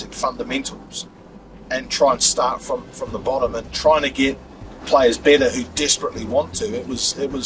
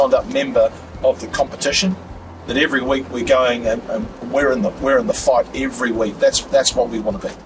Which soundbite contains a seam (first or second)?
first